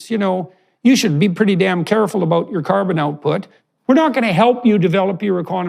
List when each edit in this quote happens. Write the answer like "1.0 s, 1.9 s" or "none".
3.5 s